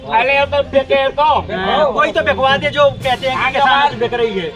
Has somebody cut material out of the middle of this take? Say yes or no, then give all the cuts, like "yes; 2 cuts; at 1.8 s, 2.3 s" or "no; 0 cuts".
no; 0 cuts